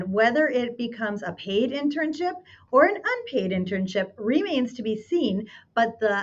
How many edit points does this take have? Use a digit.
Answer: 0